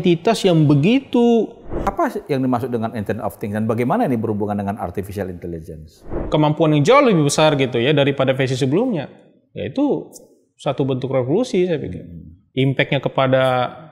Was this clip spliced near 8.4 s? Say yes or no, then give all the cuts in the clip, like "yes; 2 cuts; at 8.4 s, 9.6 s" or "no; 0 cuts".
no; 2 cuts; at 1.8 s, 6.2 s